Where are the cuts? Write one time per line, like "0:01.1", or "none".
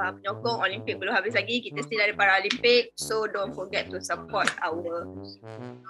none